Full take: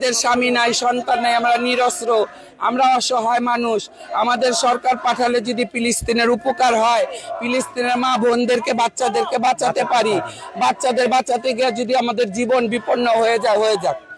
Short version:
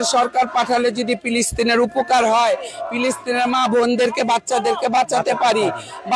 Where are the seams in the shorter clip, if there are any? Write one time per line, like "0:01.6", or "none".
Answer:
none